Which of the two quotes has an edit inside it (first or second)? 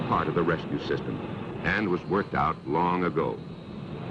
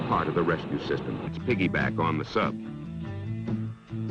first